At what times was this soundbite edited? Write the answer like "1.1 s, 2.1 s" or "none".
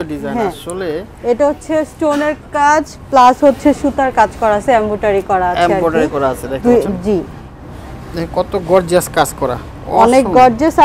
none